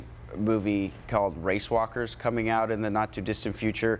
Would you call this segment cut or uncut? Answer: uncut